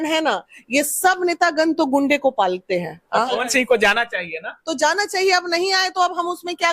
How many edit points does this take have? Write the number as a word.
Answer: one